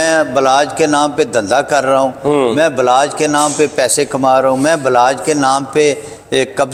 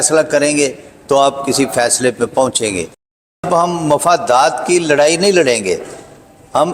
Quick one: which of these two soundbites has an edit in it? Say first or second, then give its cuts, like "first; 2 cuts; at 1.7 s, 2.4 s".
second; 1 cut; at 3.3 s